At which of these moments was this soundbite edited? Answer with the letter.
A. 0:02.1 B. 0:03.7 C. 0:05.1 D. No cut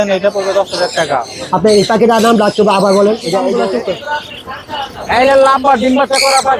B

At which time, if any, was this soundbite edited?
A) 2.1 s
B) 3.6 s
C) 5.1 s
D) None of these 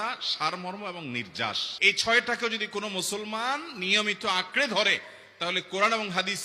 D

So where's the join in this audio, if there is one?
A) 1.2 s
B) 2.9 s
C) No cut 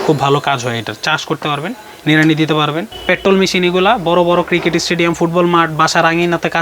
B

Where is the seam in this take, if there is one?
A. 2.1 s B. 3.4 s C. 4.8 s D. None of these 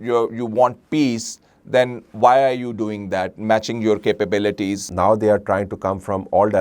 C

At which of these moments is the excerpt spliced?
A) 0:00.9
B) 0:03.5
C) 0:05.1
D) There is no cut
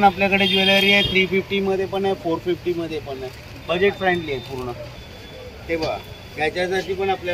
C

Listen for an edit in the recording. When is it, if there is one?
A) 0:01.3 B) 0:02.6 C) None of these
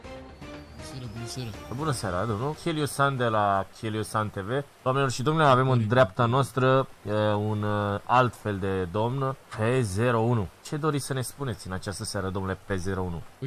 B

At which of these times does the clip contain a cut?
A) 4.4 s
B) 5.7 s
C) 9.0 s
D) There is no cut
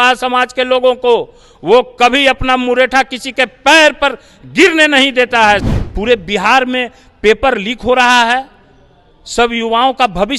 B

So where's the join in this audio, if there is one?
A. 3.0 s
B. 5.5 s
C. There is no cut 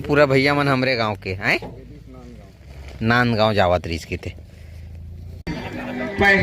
B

